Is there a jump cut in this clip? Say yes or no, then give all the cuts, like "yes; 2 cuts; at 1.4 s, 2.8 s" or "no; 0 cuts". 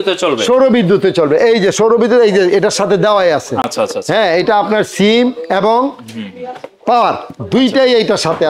no; 0 cuts